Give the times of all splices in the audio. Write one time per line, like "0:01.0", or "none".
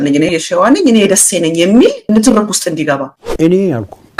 0:03.2